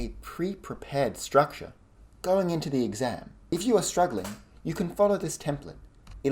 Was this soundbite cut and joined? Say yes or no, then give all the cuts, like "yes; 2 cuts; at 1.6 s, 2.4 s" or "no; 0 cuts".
yes; 1 cut; at 3.3 s